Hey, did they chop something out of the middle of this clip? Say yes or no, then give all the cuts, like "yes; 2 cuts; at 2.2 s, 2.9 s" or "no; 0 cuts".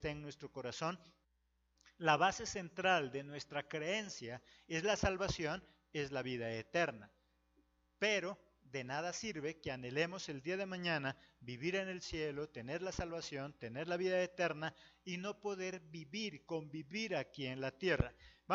yes; 1 cut; at 13.7 s